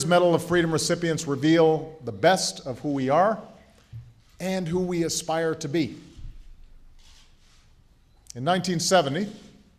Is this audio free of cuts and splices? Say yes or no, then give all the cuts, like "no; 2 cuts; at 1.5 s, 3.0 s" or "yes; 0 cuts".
yes; 0 cuts